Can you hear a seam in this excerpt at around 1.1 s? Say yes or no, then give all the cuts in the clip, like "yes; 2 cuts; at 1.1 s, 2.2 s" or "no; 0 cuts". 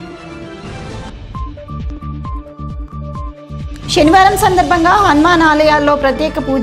yes; 1 cut; at 1.1 s